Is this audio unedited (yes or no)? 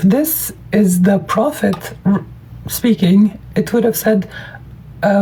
yes